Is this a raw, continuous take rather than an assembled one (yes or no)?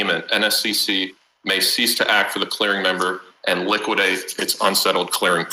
yes